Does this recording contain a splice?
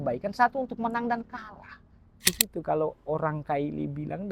yes; 1 cut; at 2.3 s

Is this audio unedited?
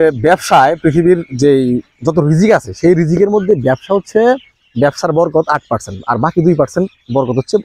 yes; 0 cuts

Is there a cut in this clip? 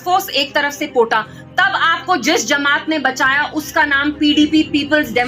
no; 0 cuts

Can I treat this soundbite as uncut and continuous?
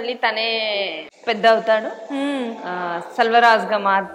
no; 1 cut; at 1.1 s

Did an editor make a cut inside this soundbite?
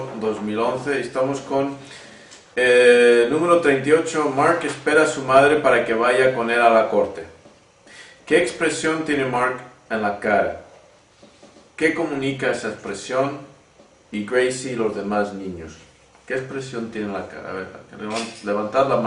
no; 0 cuts

